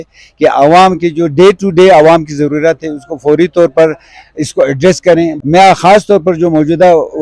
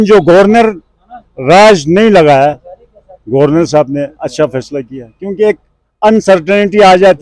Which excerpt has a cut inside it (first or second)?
first